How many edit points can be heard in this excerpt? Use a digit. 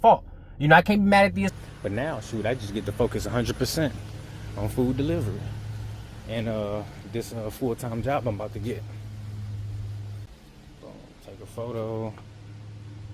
2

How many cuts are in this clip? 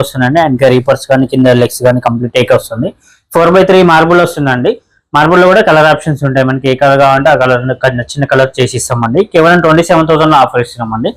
0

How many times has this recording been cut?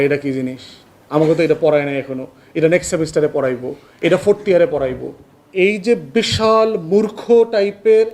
1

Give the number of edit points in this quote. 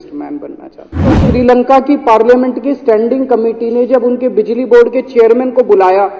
1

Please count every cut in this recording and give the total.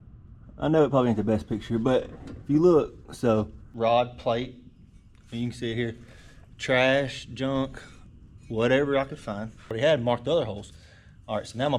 2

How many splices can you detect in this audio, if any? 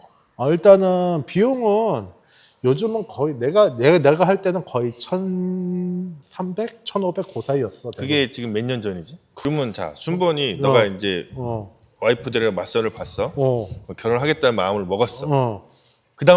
1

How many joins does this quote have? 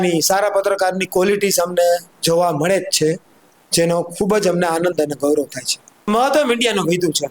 1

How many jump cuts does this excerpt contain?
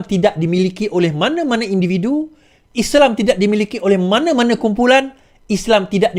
0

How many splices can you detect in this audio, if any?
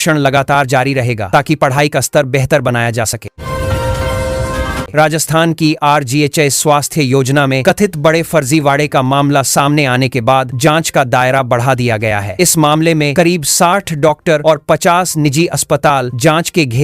2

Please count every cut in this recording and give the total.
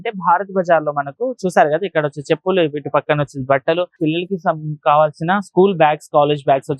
1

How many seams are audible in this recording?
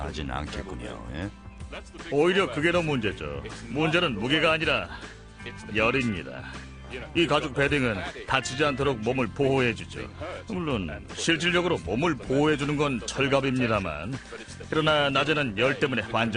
1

